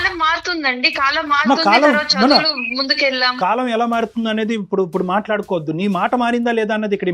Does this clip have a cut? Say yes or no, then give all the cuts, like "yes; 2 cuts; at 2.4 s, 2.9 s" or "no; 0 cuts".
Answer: yes; 1 cut; at 3.3 s